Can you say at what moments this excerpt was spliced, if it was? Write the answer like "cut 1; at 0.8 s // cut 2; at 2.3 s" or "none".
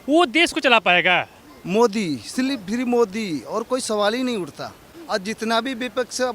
cut 1; at 1.6 s